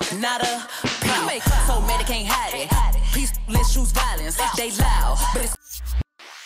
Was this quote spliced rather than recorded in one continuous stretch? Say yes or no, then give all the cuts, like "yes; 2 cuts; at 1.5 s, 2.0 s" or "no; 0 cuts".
yes; 1 cut; at 5.5 s